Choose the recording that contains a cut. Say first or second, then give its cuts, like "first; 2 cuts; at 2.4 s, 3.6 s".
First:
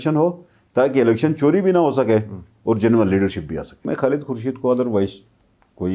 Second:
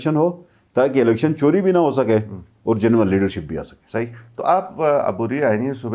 first; 1 cut; at 3.8 s